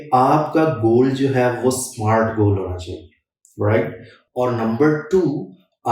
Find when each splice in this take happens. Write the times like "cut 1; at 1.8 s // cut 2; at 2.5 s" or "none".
none